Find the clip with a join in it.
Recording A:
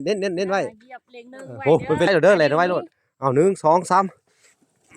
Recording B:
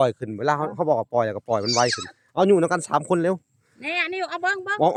A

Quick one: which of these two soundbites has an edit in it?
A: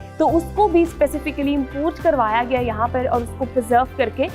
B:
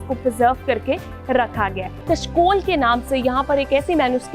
B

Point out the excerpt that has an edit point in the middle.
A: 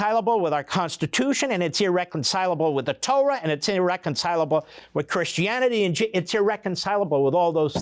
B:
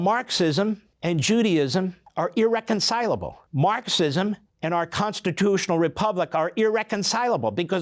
B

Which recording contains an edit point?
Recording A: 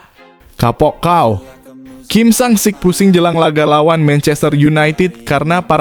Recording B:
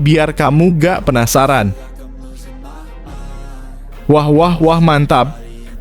B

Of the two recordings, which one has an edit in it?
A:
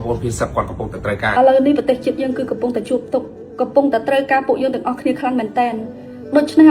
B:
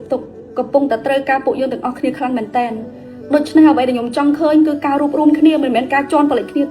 A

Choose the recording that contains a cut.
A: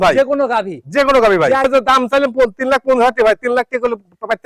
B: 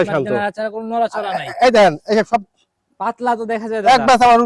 A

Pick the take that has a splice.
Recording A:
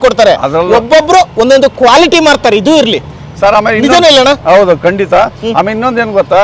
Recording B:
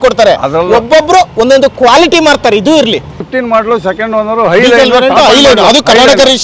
B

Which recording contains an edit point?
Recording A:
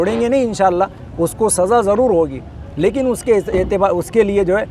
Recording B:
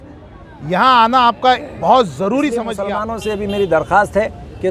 B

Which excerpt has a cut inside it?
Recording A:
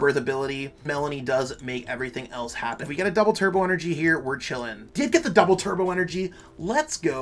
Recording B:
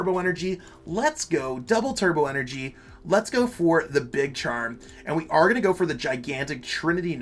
A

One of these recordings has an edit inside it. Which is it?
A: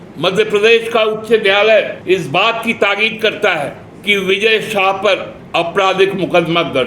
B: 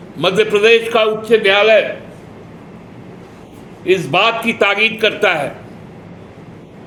A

